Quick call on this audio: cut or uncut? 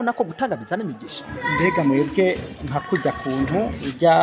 cut